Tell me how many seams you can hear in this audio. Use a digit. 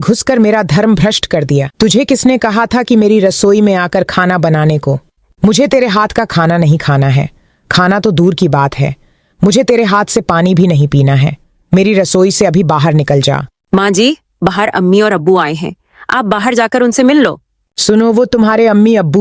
2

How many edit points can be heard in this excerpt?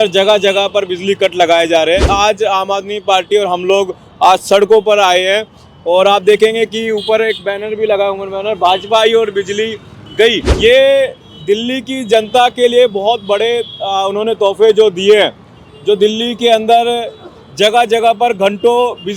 2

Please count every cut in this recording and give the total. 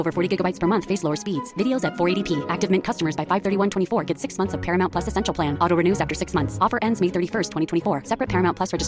0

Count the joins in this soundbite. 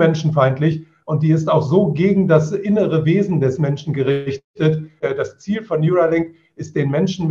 1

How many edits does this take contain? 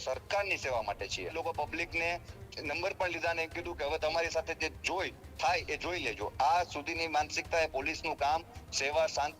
1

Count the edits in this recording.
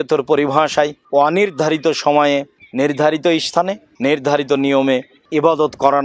4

